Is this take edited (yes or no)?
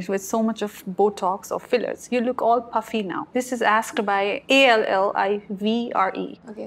no